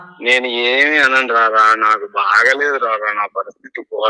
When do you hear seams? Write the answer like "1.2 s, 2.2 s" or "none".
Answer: none